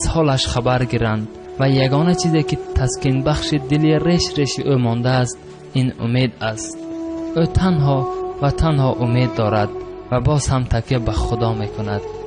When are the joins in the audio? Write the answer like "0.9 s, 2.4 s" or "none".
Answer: 2.5 s